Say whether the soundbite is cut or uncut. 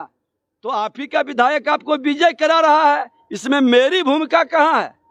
uncut